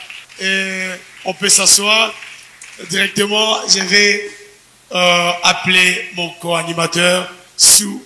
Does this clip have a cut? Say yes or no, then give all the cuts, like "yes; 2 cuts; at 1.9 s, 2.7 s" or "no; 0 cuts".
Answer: no; 0 cuts